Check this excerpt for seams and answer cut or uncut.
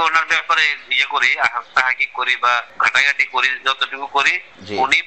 cut